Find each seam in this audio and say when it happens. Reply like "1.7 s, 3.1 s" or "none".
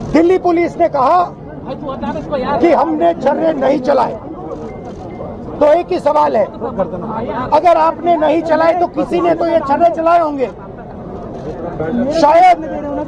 none